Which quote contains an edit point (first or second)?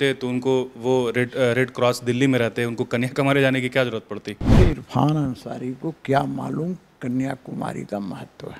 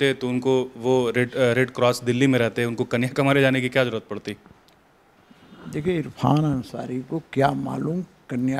first